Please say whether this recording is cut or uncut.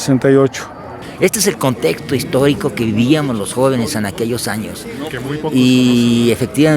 cut